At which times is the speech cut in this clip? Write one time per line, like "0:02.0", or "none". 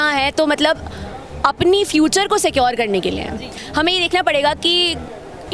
0:03.5